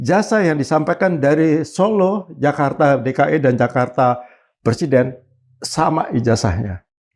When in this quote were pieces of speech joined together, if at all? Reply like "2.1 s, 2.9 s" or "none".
none